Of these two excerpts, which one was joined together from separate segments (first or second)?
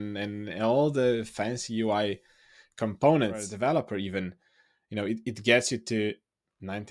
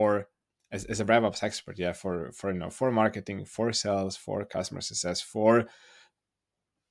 first